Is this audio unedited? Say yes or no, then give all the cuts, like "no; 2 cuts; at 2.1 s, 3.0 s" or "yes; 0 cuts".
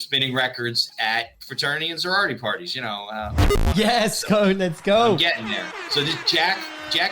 no; 1 cut; at 3.4 s